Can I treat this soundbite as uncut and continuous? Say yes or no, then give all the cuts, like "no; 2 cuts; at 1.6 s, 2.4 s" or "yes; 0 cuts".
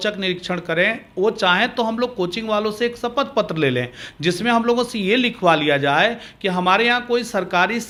yes; 0 cuts